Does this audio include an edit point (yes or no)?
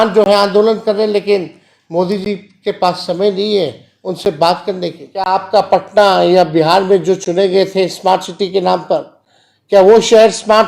yes